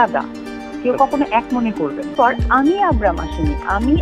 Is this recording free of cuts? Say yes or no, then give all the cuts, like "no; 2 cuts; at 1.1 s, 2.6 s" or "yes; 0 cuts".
no; 1 cut; at 2.1 s